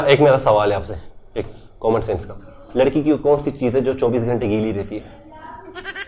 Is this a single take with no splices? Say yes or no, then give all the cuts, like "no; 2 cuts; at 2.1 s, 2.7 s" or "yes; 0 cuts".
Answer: yes; 0 cuts